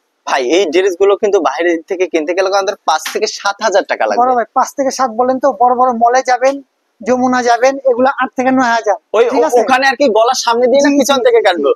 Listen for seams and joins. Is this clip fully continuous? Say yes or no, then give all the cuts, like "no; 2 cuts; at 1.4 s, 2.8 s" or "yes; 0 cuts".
yes; 0 cuts